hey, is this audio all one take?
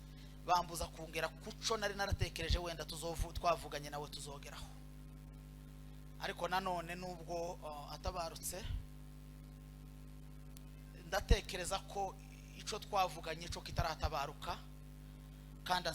yes; 0 cuts

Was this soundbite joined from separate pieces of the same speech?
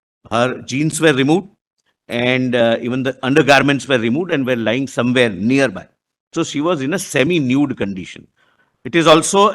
no; 0 cuts

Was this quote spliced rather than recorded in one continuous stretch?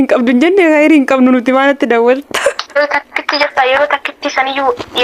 yes; 1 cut; at 2.8 s

